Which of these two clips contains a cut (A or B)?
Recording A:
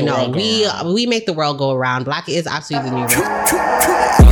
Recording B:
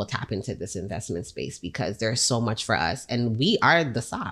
A